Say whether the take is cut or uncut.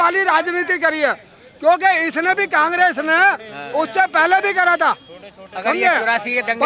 uncut